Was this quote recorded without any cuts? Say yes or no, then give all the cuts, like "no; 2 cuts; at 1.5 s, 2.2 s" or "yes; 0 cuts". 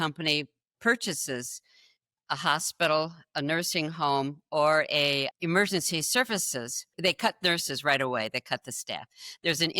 no; 2 cuts; at 5.3 s, 6.9 s